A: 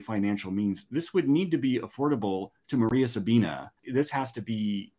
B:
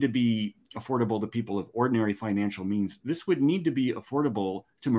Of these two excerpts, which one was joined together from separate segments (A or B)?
A